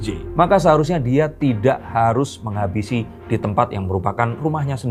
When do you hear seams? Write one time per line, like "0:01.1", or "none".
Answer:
none